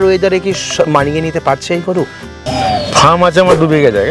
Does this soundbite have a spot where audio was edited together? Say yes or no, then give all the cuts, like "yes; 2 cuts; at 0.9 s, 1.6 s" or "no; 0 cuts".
yes; 1 cut; at 2.4 s